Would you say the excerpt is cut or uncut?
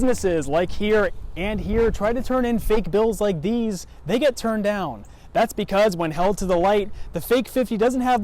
uncut